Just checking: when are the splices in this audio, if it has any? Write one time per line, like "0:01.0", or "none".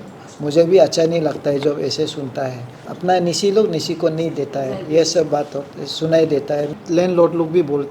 0:02.8
0:06.7